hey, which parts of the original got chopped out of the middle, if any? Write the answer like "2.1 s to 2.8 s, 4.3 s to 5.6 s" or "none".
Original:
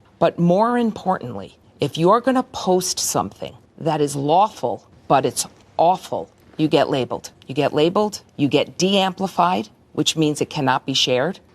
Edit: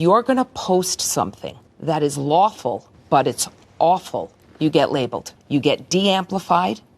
7.3 s to 8.2 s